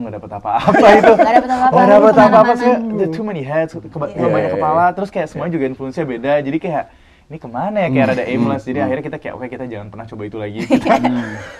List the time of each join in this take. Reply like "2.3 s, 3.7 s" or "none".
none